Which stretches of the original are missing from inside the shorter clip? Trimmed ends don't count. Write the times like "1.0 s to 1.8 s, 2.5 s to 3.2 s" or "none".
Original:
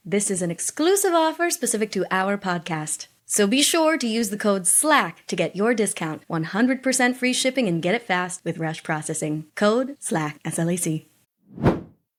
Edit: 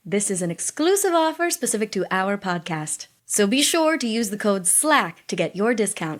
none

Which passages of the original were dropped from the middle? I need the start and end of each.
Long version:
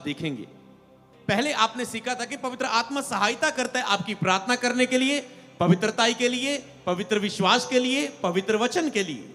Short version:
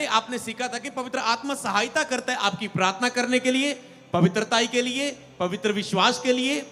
none

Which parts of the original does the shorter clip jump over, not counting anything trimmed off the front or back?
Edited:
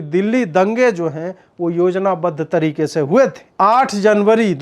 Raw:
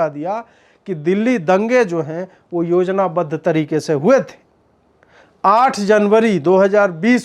4.4 s to 5.3 s

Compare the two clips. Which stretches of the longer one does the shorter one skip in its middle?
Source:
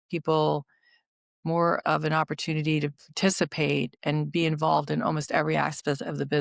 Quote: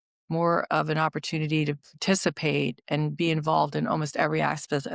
none

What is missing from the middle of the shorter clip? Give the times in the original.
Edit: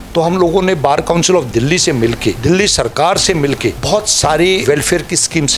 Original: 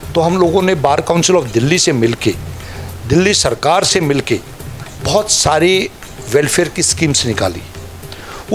2.4 s to 3.1 s, 4.5 s to 5.0 s, 5.8 s to 6.3 s

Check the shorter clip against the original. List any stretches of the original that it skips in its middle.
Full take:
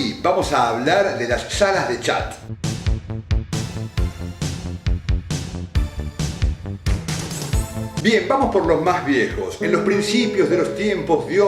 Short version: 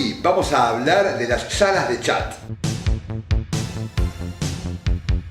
none

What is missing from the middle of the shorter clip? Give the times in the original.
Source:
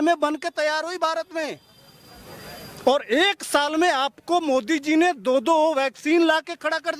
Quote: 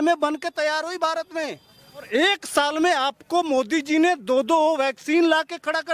2.1 s to 3.0 s

